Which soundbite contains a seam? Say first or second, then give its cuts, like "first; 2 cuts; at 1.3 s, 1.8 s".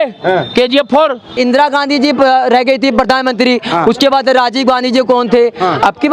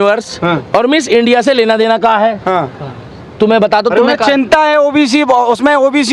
first; 1 cut; at 1.4 s